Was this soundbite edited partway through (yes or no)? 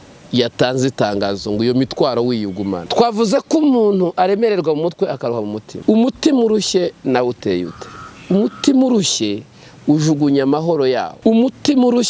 yes